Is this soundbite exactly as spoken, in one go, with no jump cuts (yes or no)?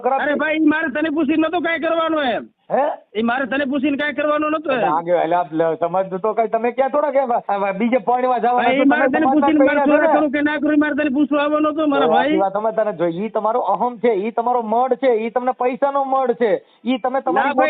no